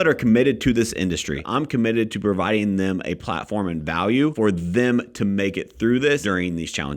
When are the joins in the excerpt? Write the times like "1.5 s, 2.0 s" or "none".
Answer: 1.5 s, 4.3 s, 6.2 s